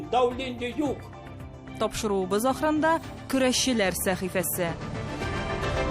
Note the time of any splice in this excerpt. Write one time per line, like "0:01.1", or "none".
0:04.8